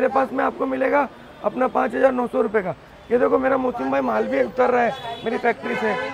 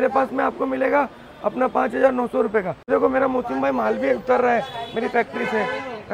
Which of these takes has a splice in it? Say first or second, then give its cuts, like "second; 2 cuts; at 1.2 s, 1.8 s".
second; 1 cut; at 2.9 s